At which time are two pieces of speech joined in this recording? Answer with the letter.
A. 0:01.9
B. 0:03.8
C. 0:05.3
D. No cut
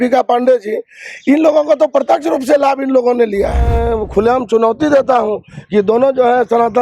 B